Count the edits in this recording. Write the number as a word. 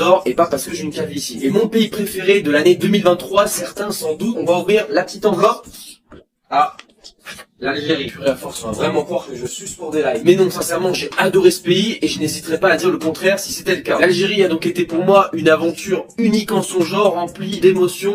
zero